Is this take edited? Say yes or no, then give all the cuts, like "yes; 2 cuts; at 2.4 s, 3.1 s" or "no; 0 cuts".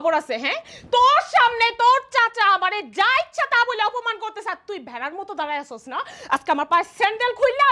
no; 0 cuts